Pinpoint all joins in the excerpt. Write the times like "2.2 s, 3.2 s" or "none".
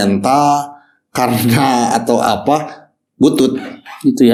none